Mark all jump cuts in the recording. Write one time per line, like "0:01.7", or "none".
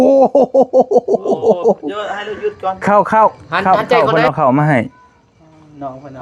0:02.8

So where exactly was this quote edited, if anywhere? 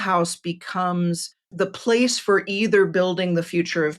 0:01.4

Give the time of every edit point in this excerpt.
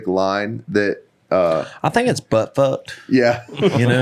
none

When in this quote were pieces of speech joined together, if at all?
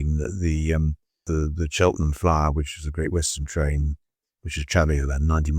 0:01.2

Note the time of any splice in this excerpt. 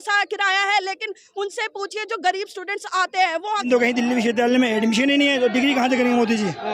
0:03.7

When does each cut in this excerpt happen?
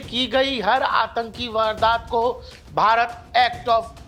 none

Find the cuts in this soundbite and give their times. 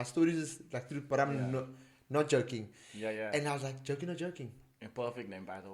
none

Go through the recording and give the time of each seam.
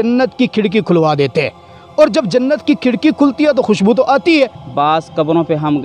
0:04.6

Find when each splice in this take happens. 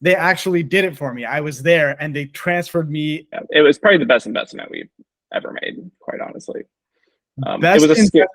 0:03.3

